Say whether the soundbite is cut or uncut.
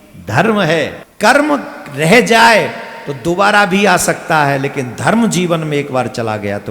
cut